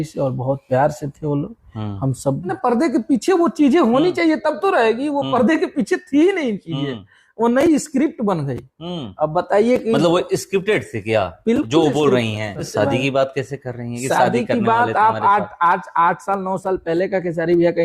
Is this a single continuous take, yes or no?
no